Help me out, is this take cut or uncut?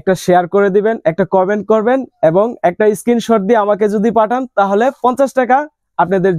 uncut